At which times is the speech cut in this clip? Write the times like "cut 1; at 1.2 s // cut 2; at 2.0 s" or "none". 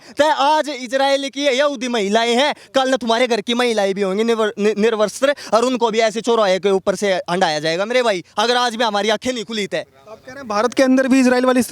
none